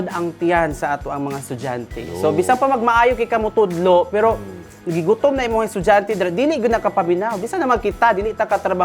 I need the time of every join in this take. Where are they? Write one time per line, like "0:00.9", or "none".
none